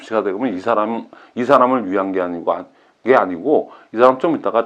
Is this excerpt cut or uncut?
uncut